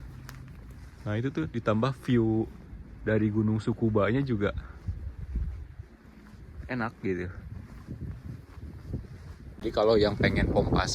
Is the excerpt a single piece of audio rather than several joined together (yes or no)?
no